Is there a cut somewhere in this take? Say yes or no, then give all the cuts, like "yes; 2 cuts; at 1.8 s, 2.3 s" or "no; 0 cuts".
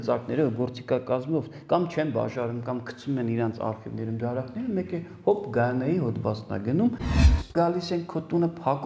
yes; 1 cut; at 7.3 s